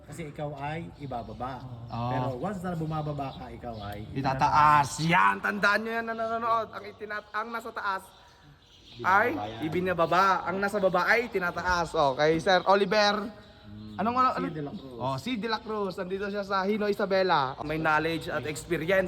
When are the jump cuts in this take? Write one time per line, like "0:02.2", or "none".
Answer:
0:17.6